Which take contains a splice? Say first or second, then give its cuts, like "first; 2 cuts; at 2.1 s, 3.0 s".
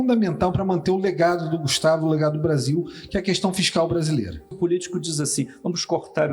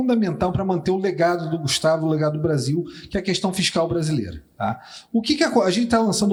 first; 1 cut; at 4.6 s